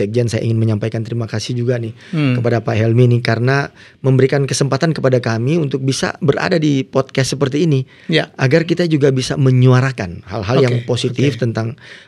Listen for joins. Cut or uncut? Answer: uncut